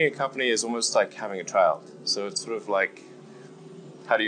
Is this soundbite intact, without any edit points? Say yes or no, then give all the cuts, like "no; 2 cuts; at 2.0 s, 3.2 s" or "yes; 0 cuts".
yes; 0 cuts